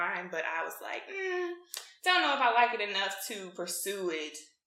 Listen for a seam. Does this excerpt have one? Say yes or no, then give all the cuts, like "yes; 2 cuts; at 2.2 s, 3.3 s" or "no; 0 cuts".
no; 0 cuts